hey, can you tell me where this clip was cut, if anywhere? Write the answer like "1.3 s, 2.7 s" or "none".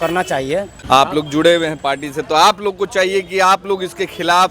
0.9 s